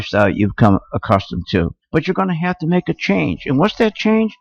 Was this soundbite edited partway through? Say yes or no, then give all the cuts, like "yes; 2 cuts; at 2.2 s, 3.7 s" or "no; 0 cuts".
no; 0 cuts